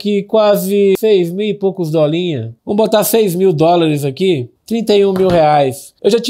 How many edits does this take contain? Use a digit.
1